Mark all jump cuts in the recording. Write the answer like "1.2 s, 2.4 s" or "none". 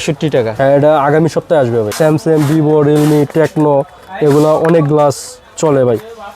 1.9 s